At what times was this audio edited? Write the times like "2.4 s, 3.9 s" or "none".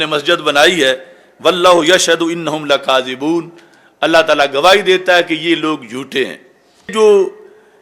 6.9 s